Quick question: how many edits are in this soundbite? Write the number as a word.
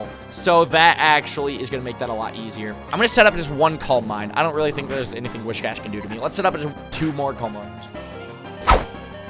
one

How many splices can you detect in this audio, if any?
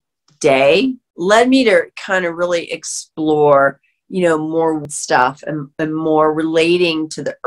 two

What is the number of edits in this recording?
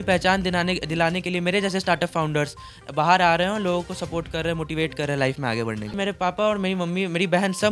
one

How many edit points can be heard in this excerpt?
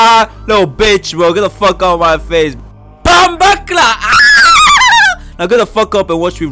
one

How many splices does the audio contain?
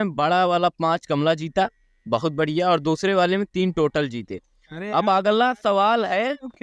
zero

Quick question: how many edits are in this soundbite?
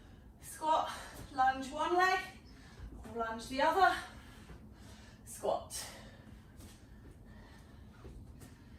zero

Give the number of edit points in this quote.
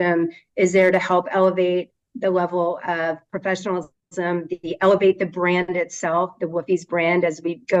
zero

